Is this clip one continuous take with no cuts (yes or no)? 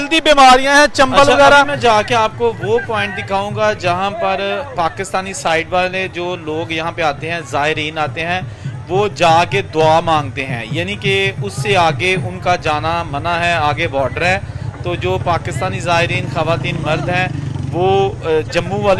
no